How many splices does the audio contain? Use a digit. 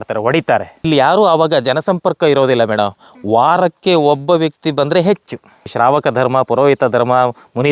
2